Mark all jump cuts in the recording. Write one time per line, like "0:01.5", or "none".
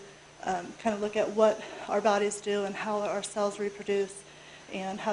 0:02.6